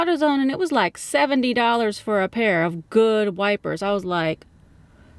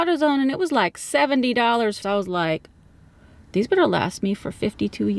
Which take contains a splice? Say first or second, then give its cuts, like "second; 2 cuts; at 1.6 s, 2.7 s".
second; 1 cut; at 2.0 s